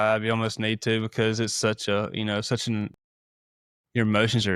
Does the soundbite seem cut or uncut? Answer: uncut